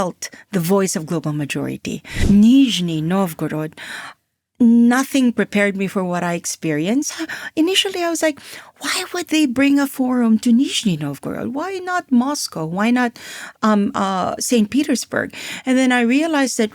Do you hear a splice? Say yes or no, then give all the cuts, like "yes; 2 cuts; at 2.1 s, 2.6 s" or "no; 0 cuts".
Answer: yes; 1 cut; at 2.2 s